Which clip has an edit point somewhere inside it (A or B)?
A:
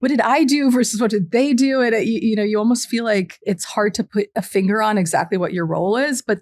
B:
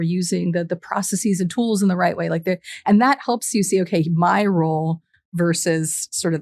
A